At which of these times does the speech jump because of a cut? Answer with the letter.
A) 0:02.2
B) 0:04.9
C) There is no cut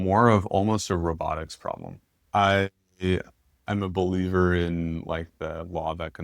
A